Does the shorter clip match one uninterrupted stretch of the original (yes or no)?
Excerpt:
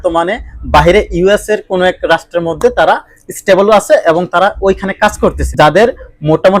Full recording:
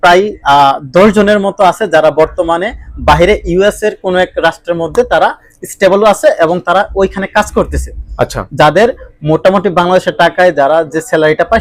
no